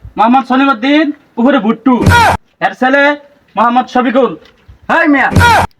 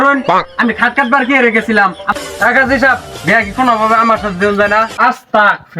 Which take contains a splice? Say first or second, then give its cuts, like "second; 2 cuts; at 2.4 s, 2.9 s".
second; 1 cut; at 2.0 s